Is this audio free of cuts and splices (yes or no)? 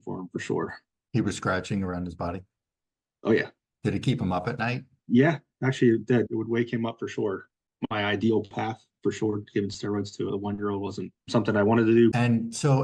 no